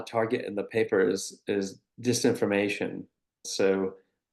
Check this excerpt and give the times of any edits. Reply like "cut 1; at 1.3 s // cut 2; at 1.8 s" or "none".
cut 1; at 3.4 s